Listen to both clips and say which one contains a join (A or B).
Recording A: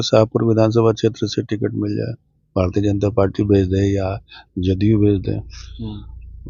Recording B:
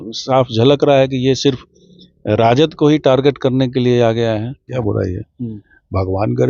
B